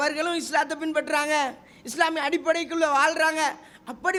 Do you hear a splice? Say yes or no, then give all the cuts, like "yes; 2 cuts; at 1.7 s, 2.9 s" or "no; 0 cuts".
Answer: no; 0 cuts